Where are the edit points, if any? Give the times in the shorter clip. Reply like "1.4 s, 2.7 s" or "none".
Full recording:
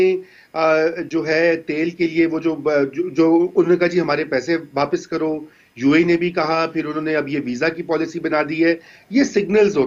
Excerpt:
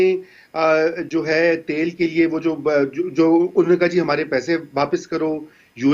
none